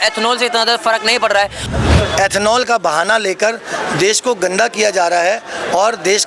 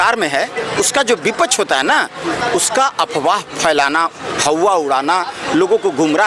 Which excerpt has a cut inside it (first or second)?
first